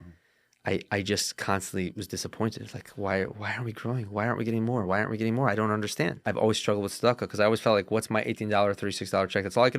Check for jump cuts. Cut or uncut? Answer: cut